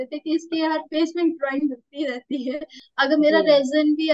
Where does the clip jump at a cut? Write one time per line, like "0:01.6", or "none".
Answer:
0:02.8